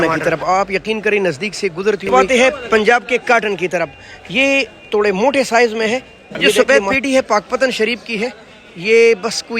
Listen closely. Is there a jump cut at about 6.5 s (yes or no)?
yes